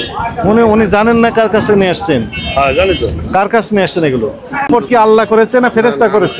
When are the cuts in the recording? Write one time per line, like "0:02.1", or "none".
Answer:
0:04.7